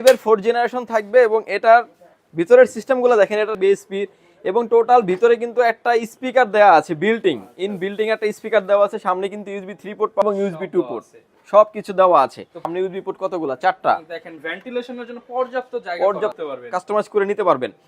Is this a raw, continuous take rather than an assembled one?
no; 4 cuts; at 3.5 s, 10.2 s, 12.7 s, 16.4 s

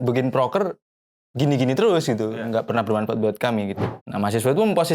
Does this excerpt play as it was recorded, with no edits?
no; 1 cut; at 3.9 s

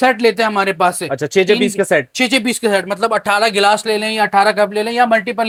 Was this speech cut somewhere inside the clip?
no; 0 cuts

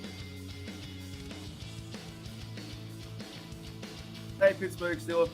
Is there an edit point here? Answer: yes; 1 cut; at 4.4 s

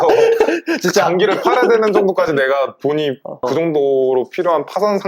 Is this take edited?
no; 0 cuts

